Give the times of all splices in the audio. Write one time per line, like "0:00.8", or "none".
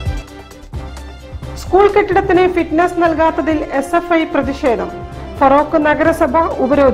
0:01.3